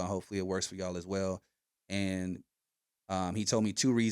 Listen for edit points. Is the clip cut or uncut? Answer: uncut